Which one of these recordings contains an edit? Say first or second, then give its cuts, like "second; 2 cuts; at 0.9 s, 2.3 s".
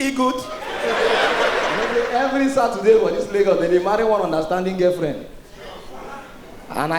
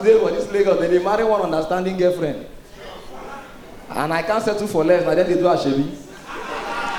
first; 1 cut; at 1.9 s